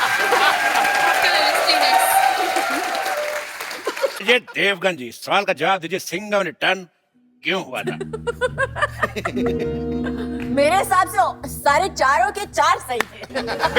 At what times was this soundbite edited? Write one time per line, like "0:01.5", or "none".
0:04.2